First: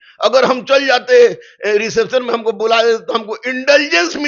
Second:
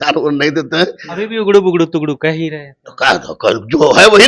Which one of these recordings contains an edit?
second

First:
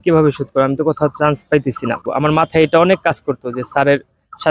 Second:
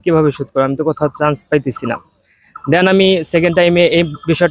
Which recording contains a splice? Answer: first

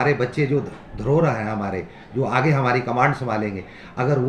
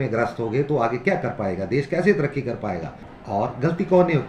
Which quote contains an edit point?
second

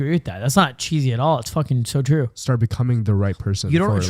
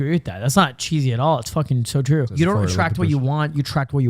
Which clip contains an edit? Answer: second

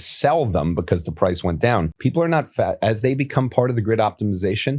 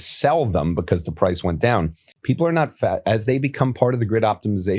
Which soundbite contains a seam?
first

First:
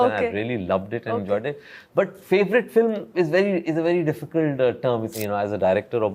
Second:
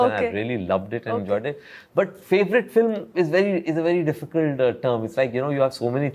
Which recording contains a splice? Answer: first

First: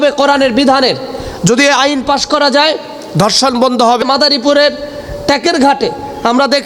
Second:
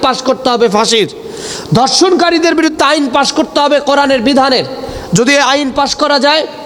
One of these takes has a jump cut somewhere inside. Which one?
first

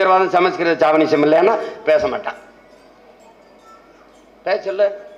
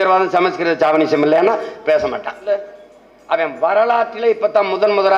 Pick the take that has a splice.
second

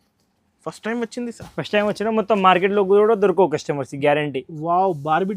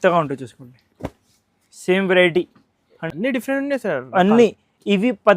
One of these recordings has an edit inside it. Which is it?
second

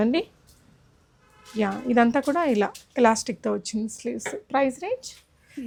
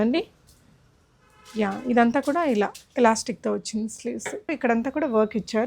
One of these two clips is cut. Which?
second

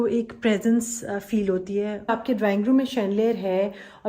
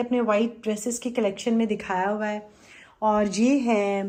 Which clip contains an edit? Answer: first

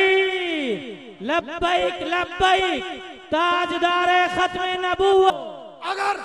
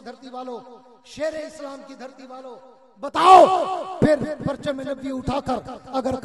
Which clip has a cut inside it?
first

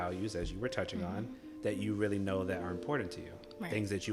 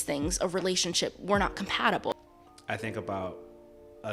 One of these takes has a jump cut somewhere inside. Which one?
second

